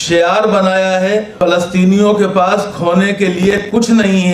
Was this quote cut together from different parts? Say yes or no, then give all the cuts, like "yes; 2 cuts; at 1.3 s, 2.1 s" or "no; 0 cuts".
yes; 1 cut; at 1.3 s